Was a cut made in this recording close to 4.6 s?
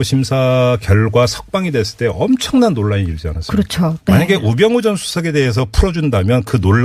no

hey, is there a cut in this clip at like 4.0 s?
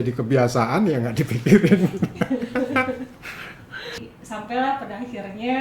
yes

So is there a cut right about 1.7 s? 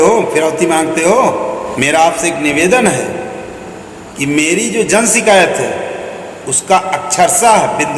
yes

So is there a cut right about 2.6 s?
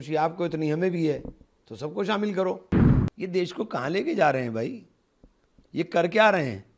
yes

